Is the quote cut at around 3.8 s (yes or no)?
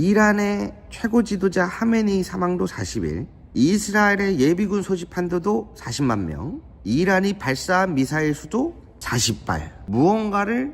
no